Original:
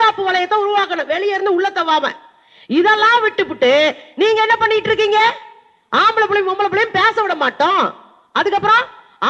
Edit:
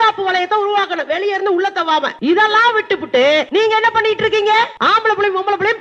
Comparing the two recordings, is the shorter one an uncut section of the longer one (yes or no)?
no